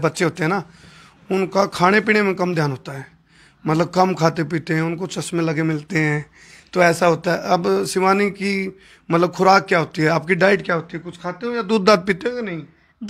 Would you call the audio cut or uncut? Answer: uncut